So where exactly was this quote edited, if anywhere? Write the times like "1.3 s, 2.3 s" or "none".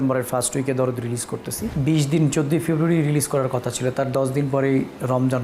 1.7 s